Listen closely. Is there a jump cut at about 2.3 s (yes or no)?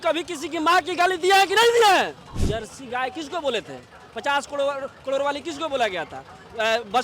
yes